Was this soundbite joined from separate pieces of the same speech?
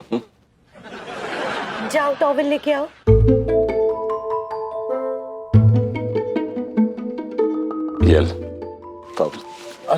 no; 0 cuts

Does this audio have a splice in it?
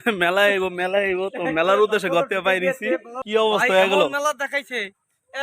yes; 1 cut; at 3.1 s

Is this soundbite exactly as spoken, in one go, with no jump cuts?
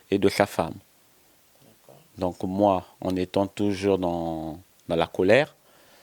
yes; 0 cuts

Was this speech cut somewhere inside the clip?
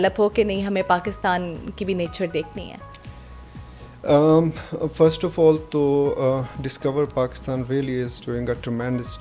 no; 0 cuts

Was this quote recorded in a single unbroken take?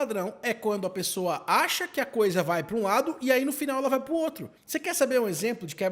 yes; 0 cuts

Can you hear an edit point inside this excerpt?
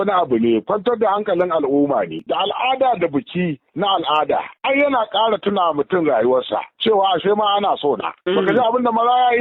yes; 1 cut; at 2.2 s

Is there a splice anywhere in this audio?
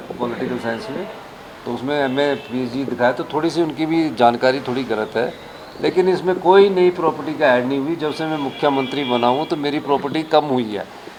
no; 0 cuts

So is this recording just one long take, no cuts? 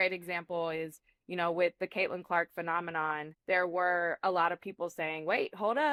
yes; 0 cuts

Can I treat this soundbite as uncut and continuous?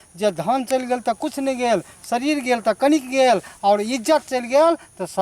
yes; 0 cuts

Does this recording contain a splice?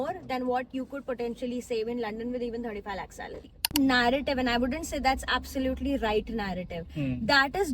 yes; 1 cut; at 3.7 s

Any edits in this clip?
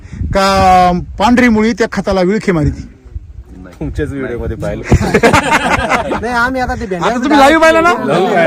no; 0 cuts

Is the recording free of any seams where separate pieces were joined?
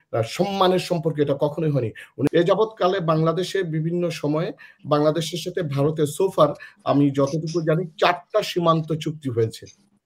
no; 1 cut; at 2.3 s

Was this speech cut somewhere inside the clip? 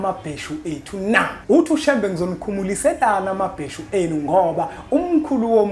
yes; 1 cut; at 1.4 s

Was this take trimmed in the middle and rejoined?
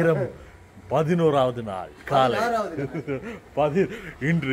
no; 0 cuts

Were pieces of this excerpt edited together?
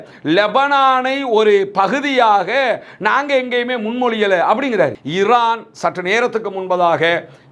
yes; 1 cut; at 5.0 s

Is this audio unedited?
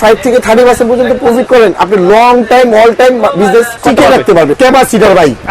no; 2 cuts; at 3.7 s, 4.6 s

